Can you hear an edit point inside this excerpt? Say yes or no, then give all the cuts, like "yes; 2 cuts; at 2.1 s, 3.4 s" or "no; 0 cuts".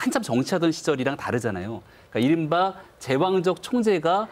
no; 0 cuts